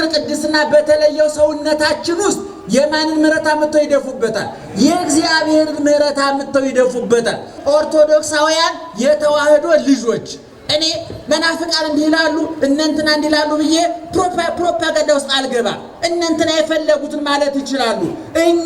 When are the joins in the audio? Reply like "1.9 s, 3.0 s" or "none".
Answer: 7.6 s